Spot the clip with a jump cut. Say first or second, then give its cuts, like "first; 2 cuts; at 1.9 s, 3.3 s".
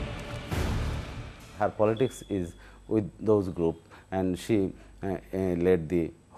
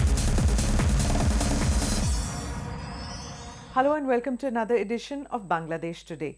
first; 1 cut; at 2.2 s